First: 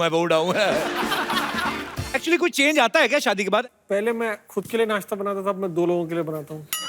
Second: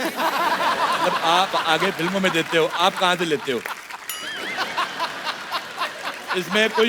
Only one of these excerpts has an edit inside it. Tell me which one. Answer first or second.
first